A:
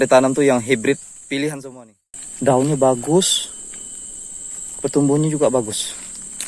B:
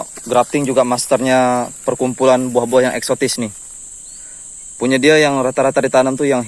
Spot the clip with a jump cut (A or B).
A